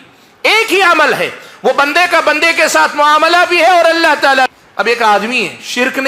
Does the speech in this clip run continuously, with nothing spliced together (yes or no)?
no